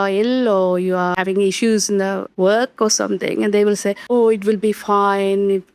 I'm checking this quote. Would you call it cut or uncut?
cut